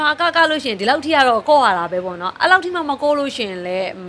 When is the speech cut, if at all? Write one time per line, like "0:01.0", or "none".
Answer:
none